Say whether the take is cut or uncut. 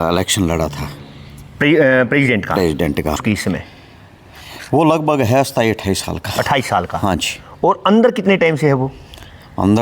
cut